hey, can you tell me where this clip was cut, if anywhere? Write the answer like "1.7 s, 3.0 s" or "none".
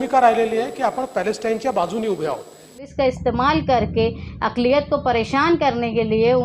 2.9 s

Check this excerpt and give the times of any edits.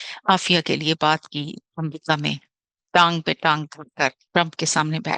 4.2 s

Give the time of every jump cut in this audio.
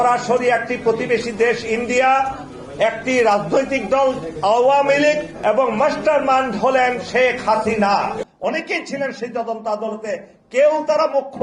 5.3 s, 8.2 s

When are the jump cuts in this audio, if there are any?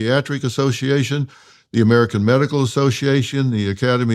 none

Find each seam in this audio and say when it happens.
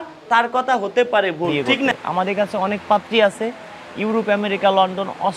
1.9 s

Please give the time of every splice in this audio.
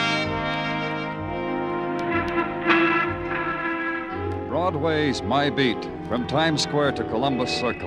none

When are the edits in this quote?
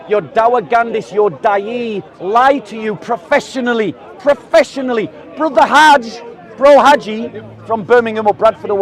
none

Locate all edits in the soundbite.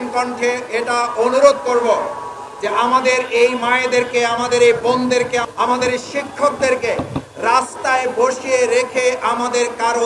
5.5 s

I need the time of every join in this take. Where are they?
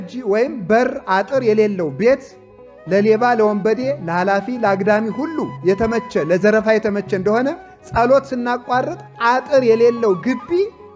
none

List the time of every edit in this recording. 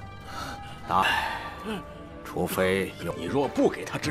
3.0 s

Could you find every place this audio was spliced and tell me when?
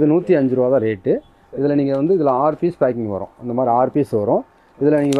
none

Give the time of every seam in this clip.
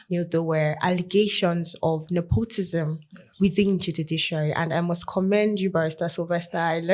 none

